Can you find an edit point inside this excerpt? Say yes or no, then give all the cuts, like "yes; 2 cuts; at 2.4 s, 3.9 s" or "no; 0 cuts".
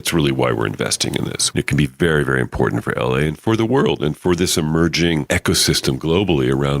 yes; 2 cuts; at 1.4 s, 5.2 s